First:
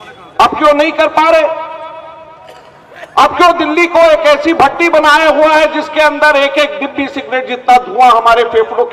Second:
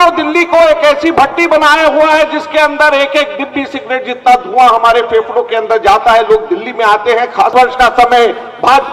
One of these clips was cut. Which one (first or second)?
second